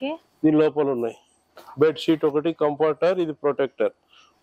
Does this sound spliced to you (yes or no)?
no